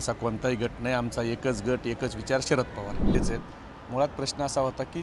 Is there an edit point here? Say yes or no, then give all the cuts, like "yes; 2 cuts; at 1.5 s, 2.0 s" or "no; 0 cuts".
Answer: yes; 1 cut; at 3.1 s